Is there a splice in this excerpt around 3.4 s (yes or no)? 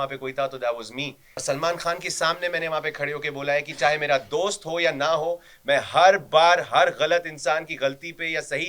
no